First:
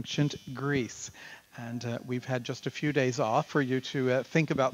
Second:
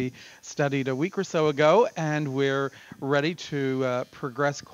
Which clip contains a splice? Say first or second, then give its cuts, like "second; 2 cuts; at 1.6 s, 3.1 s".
second; 1 cut; at 1.0 s